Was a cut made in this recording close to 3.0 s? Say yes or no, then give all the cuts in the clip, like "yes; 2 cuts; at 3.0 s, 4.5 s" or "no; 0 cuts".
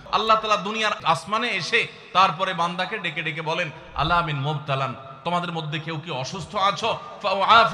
no; 1 cut; at 1.0 s